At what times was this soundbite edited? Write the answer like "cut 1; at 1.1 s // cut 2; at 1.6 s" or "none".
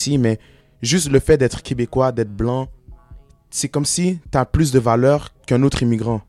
cut 1; at 5.4 s

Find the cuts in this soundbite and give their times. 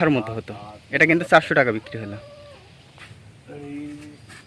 none

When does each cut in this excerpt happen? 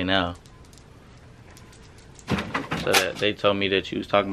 none

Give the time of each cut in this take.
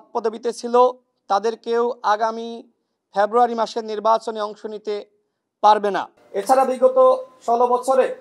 cut 1; at 6.2 s

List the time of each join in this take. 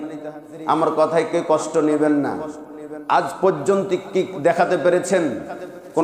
none

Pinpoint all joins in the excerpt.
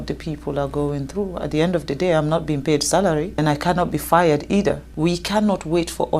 cut 1; at 3.4 s // cut 2; at 4.9 s

